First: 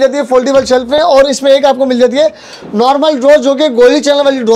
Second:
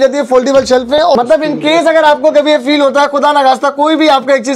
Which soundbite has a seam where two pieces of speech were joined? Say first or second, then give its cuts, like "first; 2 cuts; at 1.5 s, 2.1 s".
second; 1 cut; at 1.1 s